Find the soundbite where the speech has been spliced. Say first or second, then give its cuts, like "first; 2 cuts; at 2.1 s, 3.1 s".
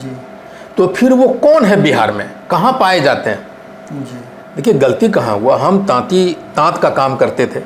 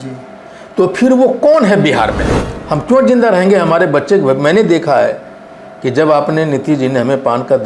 second; 1 cut; at 2.3 s